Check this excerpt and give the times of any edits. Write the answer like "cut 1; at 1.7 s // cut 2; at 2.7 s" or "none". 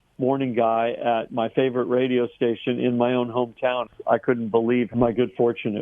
cut 1; at 3.9 s // cut 2; at 4.9 s